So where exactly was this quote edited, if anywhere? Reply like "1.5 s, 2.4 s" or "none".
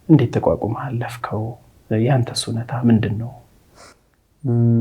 none